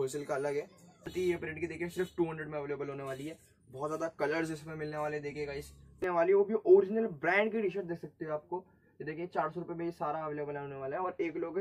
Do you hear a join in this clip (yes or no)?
yes